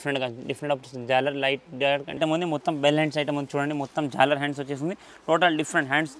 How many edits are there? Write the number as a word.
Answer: one